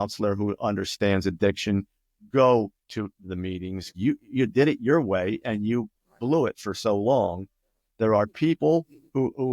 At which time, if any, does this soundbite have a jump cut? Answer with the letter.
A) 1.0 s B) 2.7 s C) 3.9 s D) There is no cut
C